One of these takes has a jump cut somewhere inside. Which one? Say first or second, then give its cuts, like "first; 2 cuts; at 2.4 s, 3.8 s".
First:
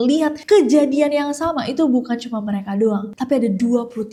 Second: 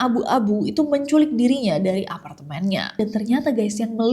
second; 1 cut; at 3.0 s